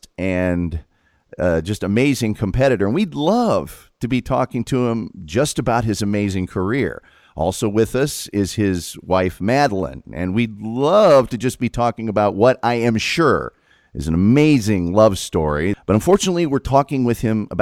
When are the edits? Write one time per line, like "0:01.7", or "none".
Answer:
0:15.8